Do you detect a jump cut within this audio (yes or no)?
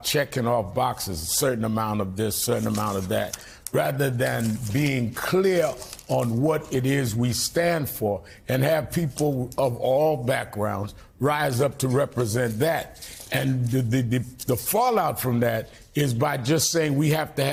no